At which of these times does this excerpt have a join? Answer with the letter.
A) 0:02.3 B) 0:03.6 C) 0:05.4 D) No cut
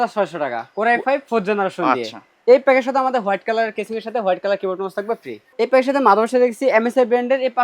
C